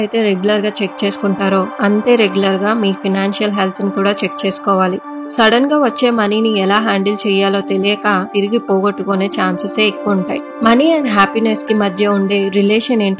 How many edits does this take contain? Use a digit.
2